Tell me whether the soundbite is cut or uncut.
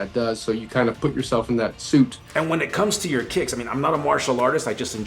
cut